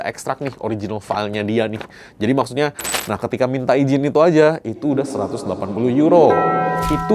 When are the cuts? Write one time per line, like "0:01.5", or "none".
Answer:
0:02.9